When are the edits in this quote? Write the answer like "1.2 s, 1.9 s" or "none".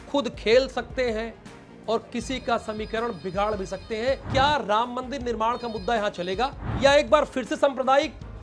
4.2 s, 6.6 s